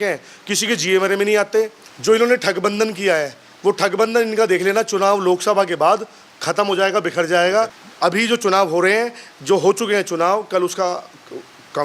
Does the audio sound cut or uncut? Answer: cut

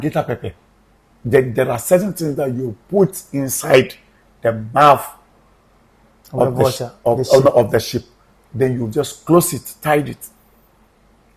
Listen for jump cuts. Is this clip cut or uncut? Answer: uncut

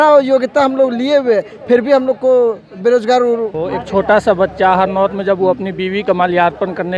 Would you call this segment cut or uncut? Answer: cut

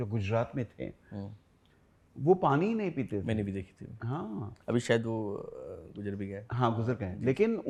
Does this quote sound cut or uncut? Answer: uncut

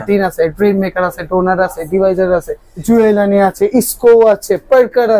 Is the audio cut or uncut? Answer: cut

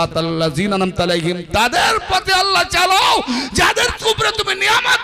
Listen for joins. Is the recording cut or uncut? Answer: uncut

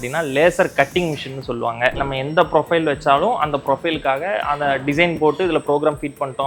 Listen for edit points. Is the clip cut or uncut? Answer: uncut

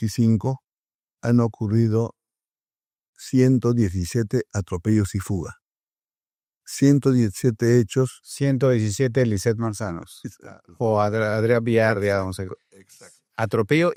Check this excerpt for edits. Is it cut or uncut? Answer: uncut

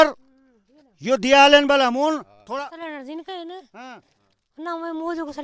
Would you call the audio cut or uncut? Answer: cut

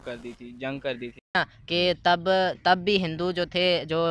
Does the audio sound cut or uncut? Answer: cut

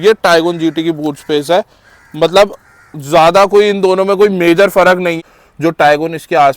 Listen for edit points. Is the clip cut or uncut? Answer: cut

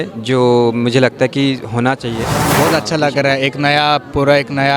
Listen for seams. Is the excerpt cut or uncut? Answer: cut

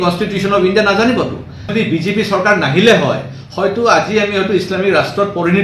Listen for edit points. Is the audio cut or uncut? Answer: cut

